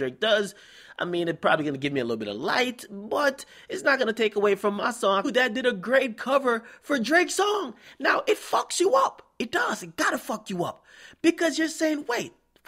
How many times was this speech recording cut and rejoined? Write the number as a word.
zero